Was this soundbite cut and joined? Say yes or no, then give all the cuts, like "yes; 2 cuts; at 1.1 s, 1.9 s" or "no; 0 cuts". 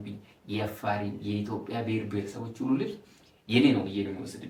no; 0 cuts